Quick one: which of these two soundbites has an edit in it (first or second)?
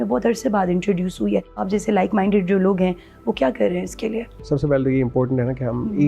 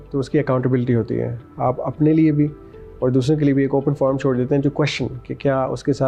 first